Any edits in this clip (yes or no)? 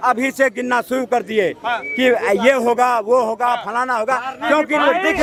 no